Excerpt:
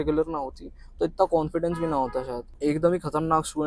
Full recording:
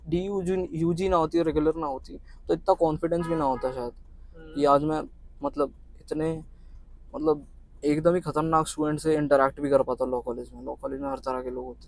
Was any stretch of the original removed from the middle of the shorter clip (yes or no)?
yes